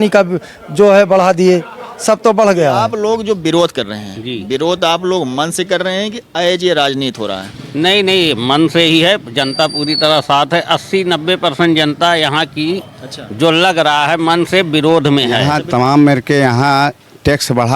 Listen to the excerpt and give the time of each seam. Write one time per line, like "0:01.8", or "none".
0:02.9
0:15.4